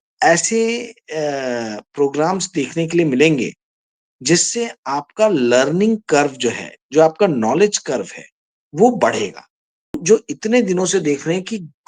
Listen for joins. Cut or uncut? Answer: cut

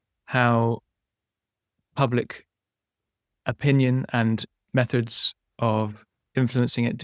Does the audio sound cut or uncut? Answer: uncut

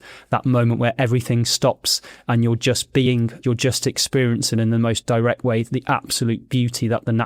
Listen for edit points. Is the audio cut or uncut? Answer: cut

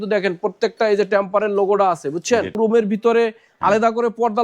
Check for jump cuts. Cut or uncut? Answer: cut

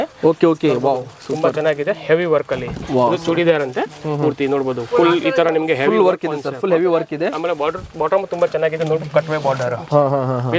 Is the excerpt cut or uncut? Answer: uncut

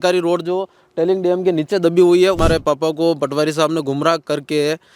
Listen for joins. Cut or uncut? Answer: cut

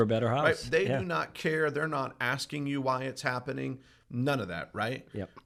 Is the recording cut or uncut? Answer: uncut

